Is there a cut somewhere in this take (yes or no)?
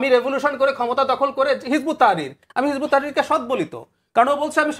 no